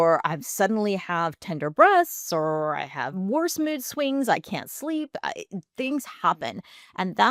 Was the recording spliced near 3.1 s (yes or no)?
yes